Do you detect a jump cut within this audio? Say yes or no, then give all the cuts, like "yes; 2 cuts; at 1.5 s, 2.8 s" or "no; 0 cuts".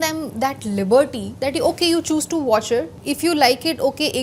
yes; 2 cuts; at 1.2 s, 3.0 s